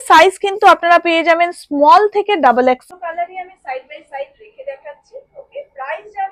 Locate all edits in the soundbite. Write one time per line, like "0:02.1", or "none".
0:02.8